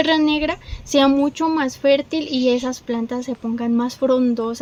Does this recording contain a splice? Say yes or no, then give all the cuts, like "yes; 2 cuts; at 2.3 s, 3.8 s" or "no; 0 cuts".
no; 0 cuts